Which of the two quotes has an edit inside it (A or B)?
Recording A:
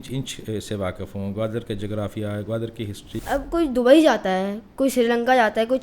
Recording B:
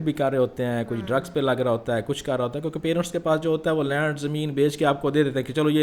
A